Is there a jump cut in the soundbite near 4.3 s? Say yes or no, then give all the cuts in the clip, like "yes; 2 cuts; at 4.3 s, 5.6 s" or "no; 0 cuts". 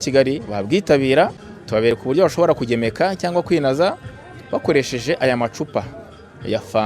no; 1 cut; at 1.9 s